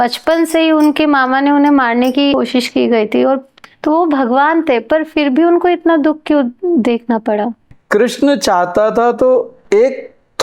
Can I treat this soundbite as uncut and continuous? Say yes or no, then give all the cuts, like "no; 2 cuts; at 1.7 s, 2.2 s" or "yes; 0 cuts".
no; 3 cuts; at 2.3 s, 3.6 s, 7.7 s